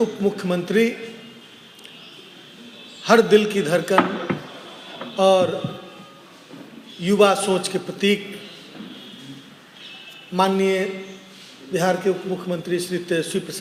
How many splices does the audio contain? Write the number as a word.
zero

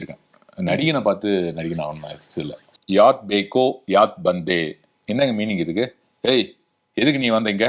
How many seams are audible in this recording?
one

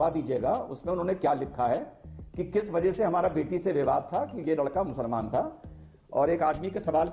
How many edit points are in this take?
zero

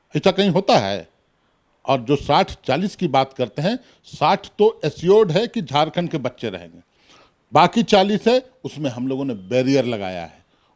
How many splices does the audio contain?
zero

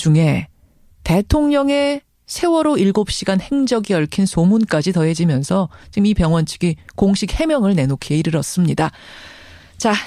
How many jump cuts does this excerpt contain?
one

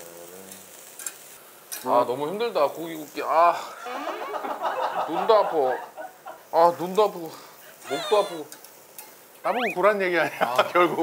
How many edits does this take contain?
one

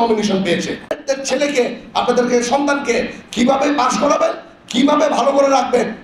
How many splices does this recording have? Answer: one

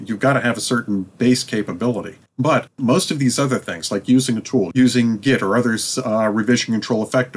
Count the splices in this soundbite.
two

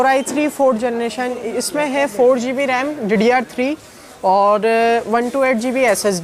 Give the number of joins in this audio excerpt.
zero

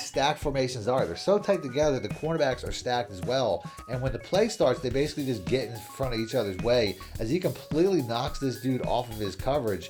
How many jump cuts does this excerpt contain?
zero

